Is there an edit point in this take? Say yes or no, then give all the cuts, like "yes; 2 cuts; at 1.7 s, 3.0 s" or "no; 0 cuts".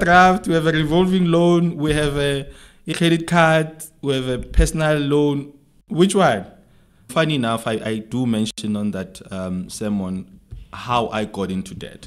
yes; 2 cuts; at 2.9 s, 7.0 s